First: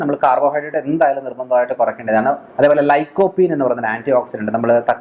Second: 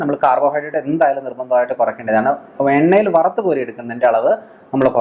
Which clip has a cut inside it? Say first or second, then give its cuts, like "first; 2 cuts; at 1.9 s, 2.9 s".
first; 1 cut; at 2.5 s